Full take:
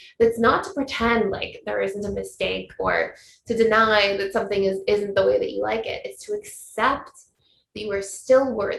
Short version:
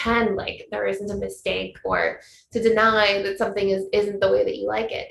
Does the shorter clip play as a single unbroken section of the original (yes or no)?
yes